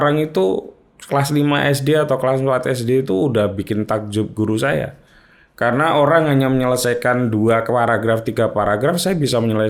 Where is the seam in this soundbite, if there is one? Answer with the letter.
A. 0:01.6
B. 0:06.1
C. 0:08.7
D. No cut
D